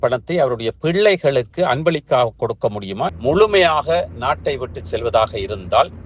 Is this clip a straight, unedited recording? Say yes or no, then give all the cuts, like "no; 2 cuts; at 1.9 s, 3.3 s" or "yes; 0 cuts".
no; 1 cut; at 3.2 s